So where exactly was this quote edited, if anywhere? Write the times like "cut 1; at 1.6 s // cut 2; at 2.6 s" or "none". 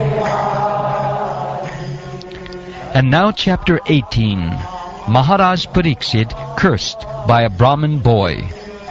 none